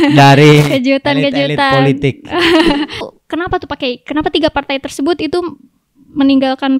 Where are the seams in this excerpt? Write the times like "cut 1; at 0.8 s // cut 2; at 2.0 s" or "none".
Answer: cut 1; at 3.1 s